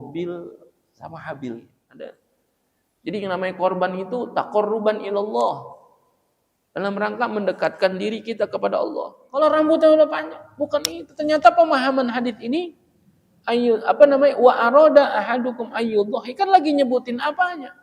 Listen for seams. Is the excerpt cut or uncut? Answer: cut